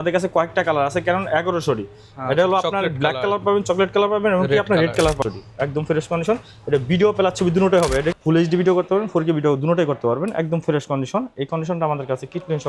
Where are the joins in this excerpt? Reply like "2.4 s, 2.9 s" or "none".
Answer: 5.2 s, 8.2 s